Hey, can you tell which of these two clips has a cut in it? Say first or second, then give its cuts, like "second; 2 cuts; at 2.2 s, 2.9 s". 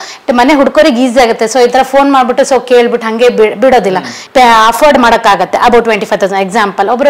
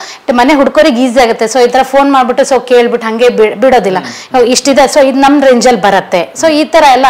first; 1 cut; at 4.1 s